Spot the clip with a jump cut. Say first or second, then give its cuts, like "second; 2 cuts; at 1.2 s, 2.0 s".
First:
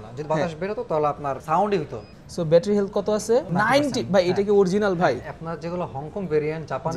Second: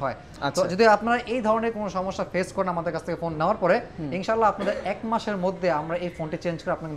first; 3 cuts; at 1.4 s, 2.1 s, 3.5 s